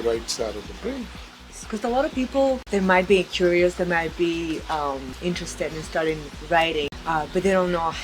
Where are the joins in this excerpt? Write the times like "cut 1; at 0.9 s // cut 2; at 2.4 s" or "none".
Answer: cut 1; at 1.6 s // cut 2; at 2.6 s // cut 3; at 5.1 s // cut 4; at 7.0 s